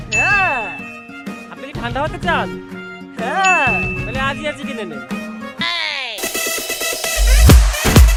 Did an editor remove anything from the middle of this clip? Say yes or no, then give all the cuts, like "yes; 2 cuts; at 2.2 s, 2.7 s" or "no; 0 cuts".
no; 0 cuts